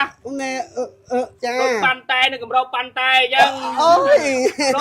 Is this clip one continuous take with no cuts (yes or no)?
no